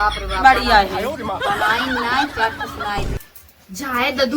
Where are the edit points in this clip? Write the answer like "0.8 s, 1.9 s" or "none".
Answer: 3.2 s